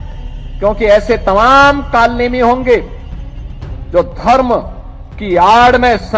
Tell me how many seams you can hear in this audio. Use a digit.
0